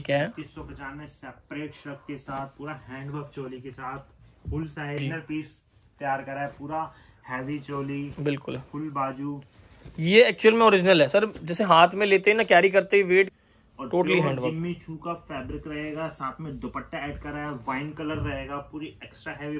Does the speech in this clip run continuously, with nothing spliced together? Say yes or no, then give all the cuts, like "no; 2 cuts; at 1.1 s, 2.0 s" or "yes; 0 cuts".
no; 2 cuts; at 5.0 s, 13.3 s